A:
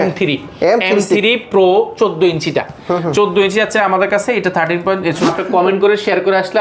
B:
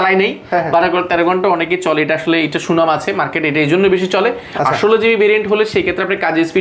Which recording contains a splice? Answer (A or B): A